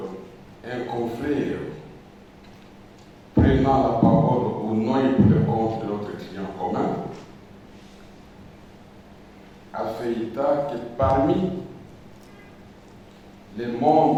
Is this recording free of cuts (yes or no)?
yes